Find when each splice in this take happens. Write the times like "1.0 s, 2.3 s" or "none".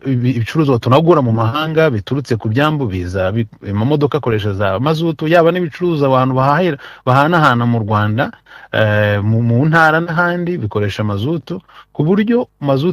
none